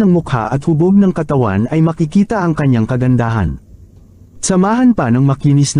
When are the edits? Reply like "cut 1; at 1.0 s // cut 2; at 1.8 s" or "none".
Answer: none